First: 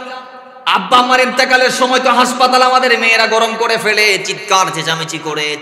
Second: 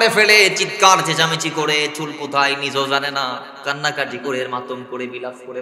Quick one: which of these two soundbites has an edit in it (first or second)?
second